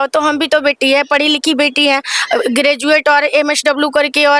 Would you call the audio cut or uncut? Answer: uncut